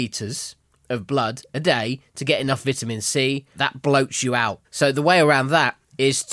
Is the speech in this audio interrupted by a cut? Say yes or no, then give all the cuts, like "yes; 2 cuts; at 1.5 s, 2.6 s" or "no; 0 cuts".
yes; 2 cuts; at 3.5 s, 4.6 s